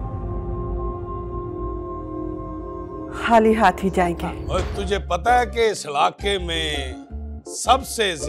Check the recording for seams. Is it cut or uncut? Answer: cut